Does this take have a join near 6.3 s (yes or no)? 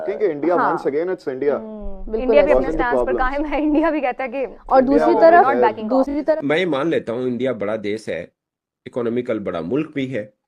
yes